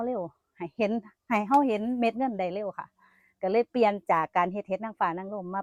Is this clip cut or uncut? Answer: uncut